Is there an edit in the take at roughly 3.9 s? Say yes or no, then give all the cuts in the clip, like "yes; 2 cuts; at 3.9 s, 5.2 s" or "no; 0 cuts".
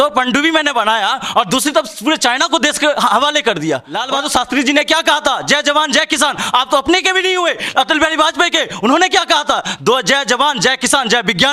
yes; 1 cut; at 3.9 s